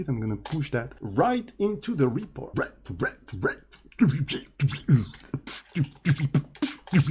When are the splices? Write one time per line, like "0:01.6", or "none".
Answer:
0:01.0
0:02.5

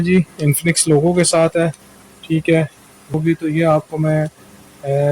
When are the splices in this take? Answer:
0:03.2

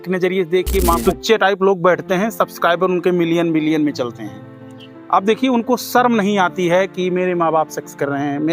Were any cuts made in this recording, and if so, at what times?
0:01.0

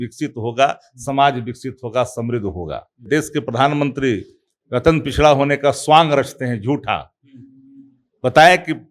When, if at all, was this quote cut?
0:03.0

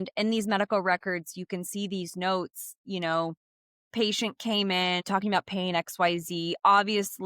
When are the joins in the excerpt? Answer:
0:05.0

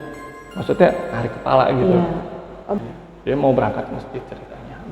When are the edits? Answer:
0:02.8

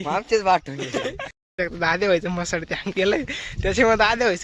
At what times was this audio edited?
0:01.3

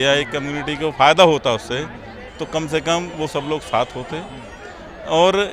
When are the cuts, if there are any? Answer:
none

